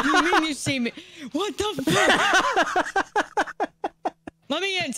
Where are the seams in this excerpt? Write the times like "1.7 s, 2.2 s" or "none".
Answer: none